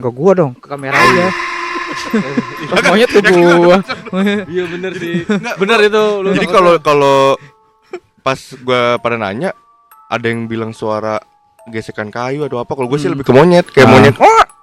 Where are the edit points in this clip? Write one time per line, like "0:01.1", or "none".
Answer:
none